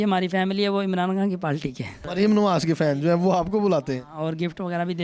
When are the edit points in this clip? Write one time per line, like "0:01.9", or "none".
0:02.1